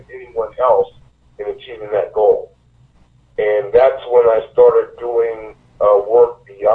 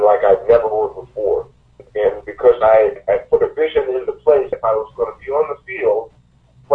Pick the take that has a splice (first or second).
second